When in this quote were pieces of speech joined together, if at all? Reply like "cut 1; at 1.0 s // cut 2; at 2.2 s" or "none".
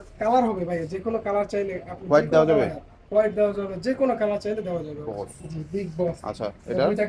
cut 1; at 5.1 s